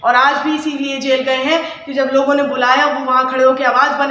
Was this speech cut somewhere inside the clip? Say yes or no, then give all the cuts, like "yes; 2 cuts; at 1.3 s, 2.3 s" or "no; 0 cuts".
no; 0 cuts